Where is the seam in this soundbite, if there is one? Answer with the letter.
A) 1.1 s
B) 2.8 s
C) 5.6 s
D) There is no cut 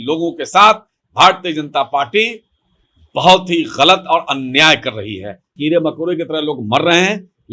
C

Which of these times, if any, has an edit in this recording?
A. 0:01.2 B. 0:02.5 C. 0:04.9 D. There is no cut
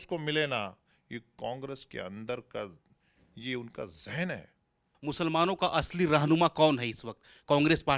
C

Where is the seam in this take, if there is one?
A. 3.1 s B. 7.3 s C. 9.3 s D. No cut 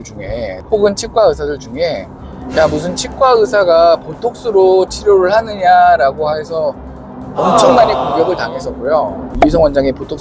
C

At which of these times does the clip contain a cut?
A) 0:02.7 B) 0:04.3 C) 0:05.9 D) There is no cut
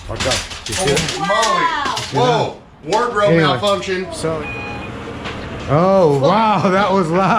B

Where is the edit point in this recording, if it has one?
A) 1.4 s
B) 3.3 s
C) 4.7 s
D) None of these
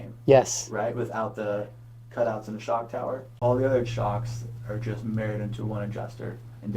B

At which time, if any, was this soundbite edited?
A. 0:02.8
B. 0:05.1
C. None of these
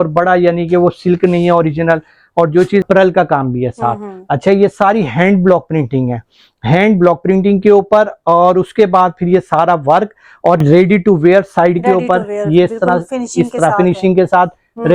A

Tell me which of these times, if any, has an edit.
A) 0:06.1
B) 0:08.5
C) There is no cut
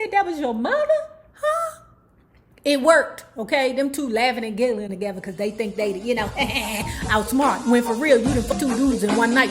B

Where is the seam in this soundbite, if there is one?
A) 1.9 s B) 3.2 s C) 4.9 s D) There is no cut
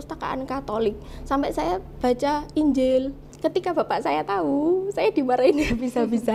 B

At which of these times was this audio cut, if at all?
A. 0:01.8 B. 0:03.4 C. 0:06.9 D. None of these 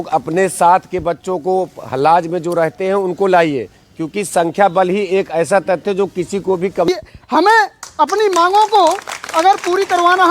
C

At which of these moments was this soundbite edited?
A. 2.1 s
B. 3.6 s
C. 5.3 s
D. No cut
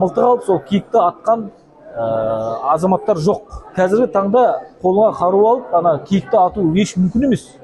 B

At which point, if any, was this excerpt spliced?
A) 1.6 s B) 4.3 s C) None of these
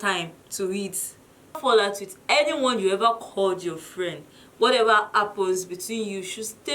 A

